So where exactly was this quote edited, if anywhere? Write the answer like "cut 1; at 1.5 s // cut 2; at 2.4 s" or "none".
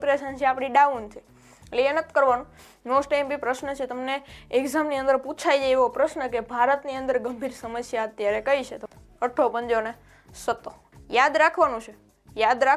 cut 1; at 2.5 s // cut 2; at 8.8 s // cut 3; at 10.8 s